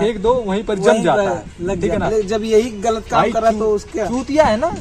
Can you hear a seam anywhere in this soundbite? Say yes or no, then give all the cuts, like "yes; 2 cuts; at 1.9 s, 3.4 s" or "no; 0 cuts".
yes; 1 cut; at 2.1 s